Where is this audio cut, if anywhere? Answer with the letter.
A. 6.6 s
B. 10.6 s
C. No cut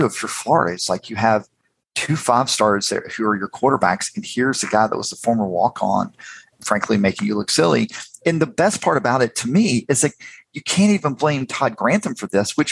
A